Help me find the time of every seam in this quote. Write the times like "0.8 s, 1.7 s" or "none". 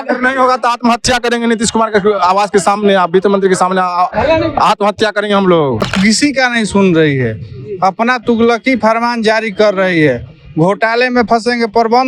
5.8 s